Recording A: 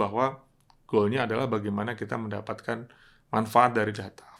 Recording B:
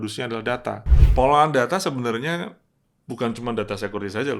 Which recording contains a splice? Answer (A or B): B